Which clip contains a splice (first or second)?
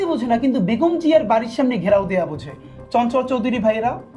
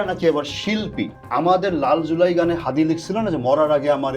second